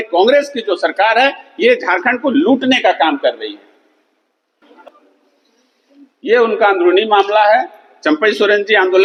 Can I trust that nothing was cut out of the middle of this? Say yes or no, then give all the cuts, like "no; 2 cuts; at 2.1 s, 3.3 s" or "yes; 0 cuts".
yes; 0 cuts